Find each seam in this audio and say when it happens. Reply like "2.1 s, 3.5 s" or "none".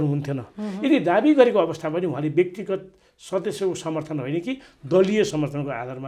none

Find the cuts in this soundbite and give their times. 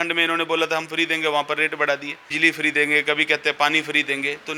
2.6 s

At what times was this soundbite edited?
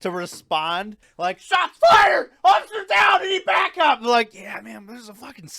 1.0 s

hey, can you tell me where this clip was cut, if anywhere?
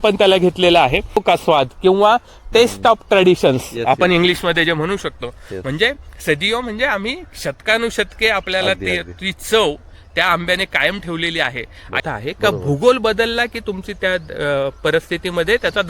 1.2 s, 12.0 s

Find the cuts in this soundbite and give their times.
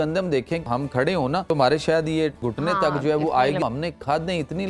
1.1 s, 2.4 s, 3.6 s

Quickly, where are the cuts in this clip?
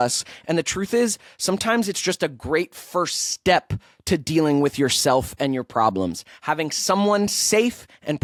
none

